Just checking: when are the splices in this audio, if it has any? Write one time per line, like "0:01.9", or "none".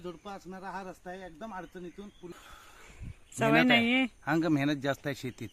0:02.3